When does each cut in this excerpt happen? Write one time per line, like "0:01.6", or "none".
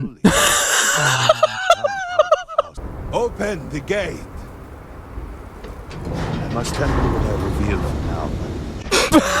0:02.7